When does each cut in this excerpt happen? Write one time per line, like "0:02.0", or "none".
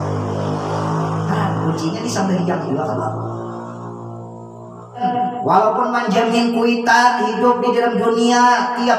0:05.0